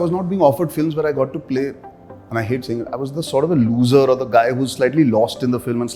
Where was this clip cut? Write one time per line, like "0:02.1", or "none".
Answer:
none